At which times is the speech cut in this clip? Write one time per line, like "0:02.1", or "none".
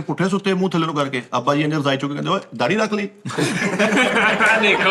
none